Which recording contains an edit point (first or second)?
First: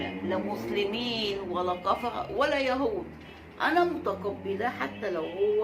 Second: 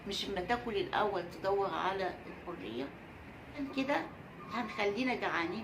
second